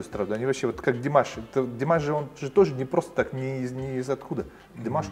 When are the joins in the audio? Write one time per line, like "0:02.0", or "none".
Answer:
none